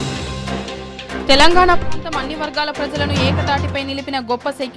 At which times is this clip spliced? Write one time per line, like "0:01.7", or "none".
0:01.2